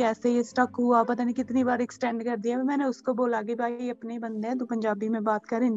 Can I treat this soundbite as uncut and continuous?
yes; 0 cuts

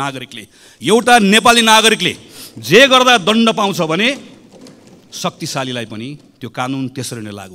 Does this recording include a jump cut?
no; 0 cuts

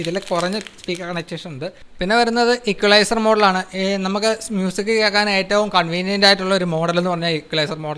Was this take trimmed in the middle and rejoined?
yes; 1 cut; at 1.8 s

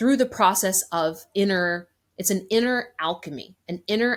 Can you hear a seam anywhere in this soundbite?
no; 0 cuts

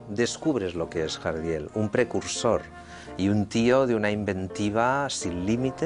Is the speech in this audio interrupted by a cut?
no; 0 cuts

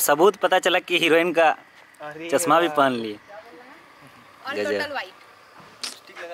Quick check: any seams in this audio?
no; 0 cuts

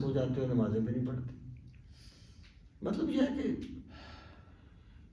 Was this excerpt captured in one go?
yes; 0 cuts

